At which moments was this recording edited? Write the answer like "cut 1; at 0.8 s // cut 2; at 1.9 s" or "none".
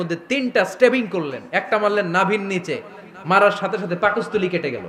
none

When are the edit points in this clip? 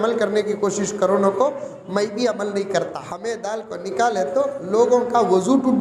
cut 1; at 3.1 s

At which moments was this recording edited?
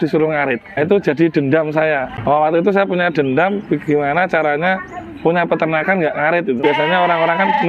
cut 1; at 0.8 s // cut 2; at 2.1 s // cut 3; at 6.6 s

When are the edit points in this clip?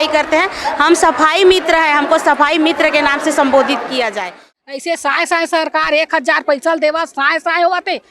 cut 1; at 4.6 s

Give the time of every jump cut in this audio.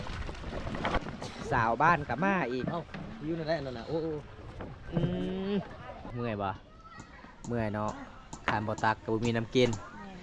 cut 1; at 0.9 s // cut 2; at 6.1 s

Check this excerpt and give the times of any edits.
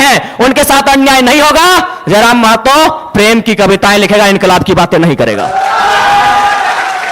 none

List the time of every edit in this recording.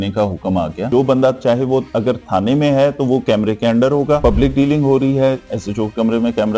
cut 1; at 0.8 s // cut 2; at 4.2 s

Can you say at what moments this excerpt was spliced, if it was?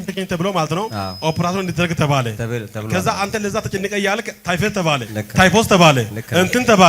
cut 1; at 0.9 s // cut 2; at 2.4 s // cut 3; at 5.1 s

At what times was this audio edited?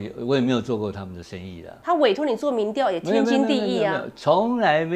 cut 1; at 1.7 s

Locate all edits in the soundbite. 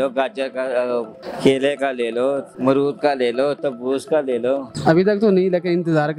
cut 1; at 1.2 s // cut 2; at 2.5 s // cut 3; at 4.7 s

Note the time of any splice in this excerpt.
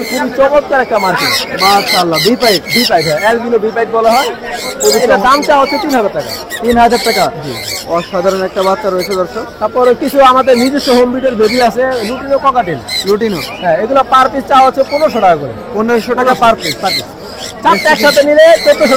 none

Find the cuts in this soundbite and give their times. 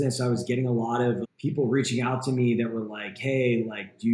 cut 1; at 1.3 s

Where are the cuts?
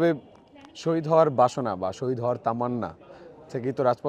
none

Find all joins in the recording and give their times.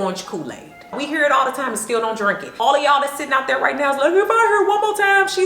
cut 1; at 0.9 s

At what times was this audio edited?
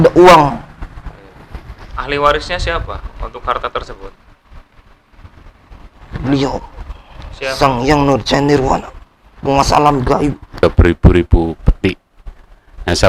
cut 1; at 1.8 s // cut 2; at 10.6 s

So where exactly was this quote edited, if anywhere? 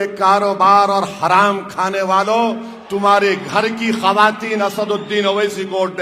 none

